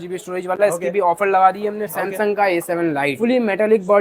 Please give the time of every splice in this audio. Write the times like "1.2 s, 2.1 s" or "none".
1.9 s